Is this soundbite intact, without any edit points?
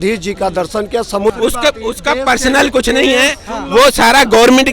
no; 1 cut; at 1.3 s

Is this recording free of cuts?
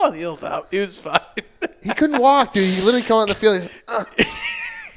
yes; 0 cuts

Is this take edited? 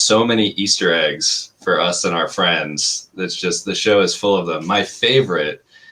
no; 0 cuts

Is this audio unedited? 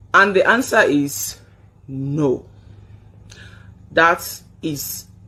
yes; 0 cuts

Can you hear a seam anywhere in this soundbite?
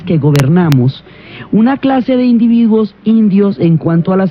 no; 0 cuts

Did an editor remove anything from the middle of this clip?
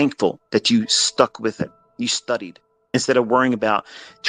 yes; 2 cuts; at 1.8 s, 2.9 s

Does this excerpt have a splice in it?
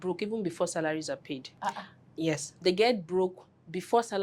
yes; 2 cuts; at 1.5 s, 2.6 s

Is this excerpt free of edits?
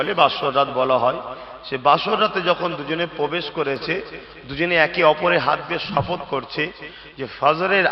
yes; 0 cuts

